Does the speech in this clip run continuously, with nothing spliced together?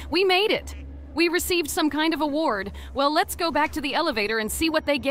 yes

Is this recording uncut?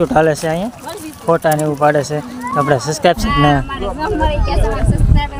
yes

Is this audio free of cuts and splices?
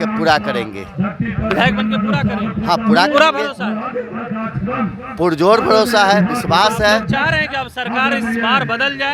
yes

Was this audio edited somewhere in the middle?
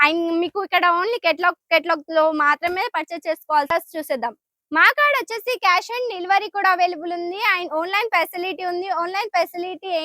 yes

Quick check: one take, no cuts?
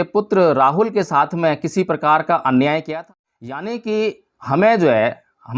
no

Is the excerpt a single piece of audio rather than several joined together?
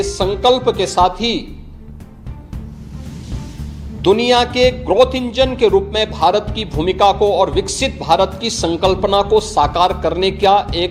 yes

